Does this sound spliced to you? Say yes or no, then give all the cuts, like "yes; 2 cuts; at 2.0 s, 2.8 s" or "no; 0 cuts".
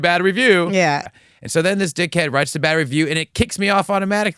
yes; 1 cut; at 1.1 s